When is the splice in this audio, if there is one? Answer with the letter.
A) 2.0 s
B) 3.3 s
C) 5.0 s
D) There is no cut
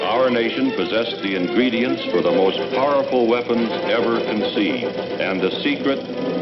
C